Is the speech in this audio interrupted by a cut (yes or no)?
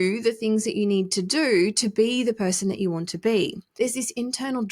yes